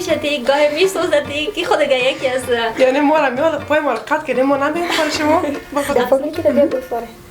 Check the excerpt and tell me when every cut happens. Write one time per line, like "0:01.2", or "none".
0:05.7